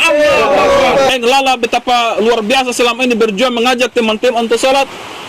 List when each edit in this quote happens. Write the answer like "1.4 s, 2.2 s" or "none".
1.1 s